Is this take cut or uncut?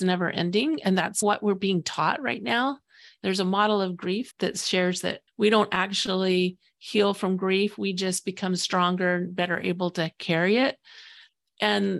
cut